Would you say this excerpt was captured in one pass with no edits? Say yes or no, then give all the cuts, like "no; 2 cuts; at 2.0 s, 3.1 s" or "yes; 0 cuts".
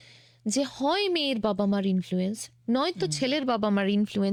yes; 0 cuts